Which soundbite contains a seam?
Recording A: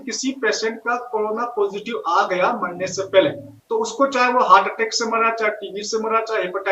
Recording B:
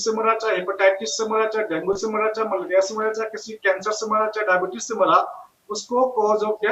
A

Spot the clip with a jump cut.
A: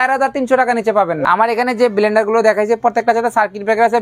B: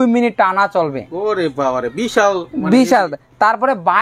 A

